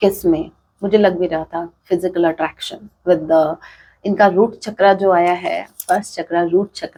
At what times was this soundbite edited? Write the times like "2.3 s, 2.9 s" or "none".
none